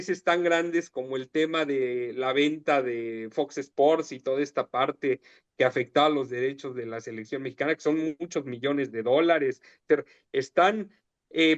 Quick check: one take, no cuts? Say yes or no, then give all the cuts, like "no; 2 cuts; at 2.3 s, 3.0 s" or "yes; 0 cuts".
yes; 0 cuts